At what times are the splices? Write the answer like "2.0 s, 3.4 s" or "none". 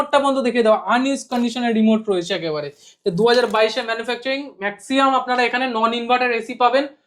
none